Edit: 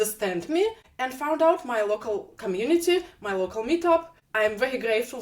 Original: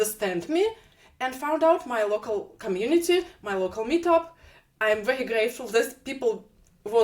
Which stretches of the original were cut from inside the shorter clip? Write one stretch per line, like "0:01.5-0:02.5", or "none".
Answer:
0:00.9-0:01.1
0:04.4-0:04.7